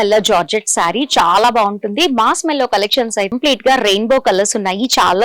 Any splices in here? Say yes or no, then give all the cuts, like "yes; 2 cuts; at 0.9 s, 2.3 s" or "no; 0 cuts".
yes; 1 cut; at 3.3 s